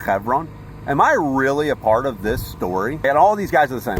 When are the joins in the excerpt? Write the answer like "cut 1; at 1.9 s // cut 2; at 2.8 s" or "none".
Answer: cut 1; at 3.0 s